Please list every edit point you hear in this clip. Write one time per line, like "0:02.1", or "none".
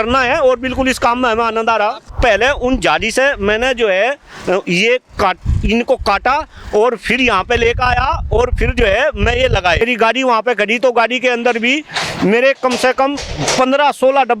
0:02.1
0:09.8